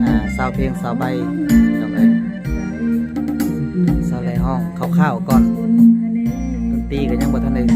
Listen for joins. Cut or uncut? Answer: uncut